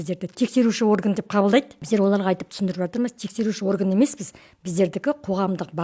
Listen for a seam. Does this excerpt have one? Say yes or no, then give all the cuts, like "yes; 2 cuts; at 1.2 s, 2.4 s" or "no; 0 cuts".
yes; 1 cut; at 1.8 s